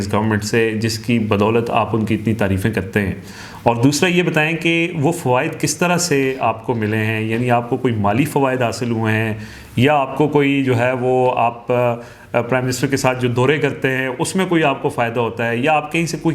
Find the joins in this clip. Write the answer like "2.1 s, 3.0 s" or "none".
none

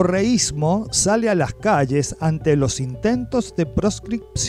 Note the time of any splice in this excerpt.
none

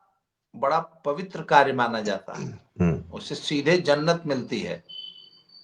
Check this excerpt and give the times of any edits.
2.6 s

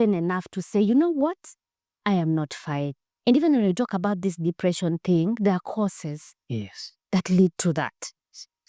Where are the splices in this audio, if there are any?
none

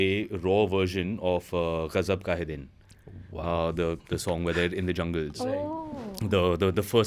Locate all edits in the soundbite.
none

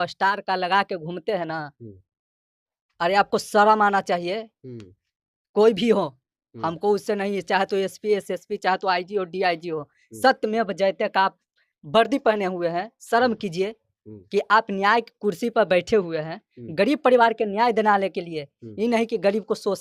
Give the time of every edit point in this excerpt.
none

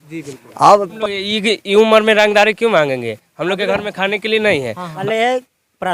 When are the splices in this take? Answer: 0.9 s, 4.8 s

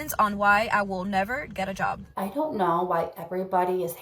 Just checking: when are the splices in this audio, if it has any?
2.1 s

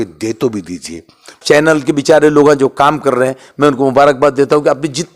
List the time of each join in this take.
1.4 s

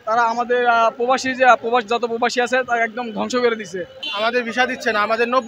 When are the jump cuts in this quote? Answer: 4.0 s

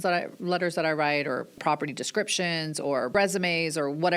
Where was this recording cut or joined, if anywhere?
1.5 s, 3.1 s

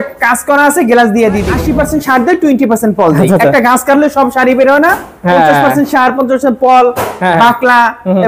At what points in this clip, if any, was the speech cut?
1.6 s

